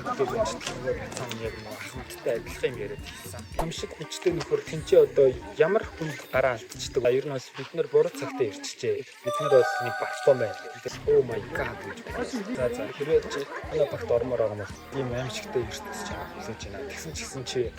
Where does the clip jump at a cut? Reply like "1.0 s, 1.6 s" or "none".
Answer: 3.6 s, 7.0 s, 10.8 s, 14.8 s